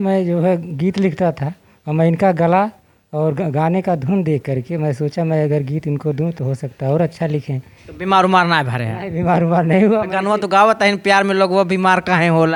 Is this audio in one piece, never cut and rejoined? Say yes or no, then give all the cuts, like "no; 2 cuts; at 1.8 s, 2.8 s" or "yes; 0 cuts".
yes; 0 cuts